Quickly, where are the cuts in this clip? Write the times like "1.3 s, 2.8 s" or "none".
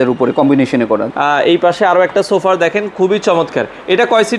1.1 s